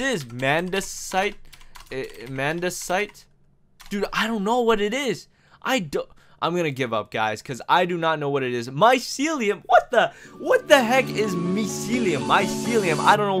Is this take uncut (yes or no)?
yes